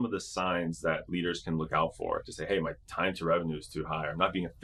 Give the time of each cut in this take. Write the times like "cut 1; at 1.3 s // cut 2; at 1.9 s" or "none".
none